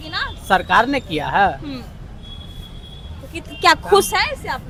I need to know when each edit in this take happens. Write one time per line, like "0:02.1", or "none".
none